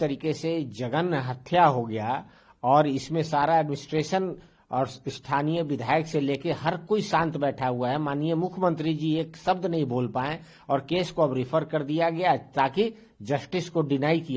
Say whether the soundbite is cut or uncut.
uncut